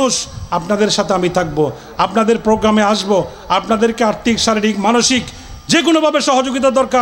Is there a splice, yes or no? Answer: no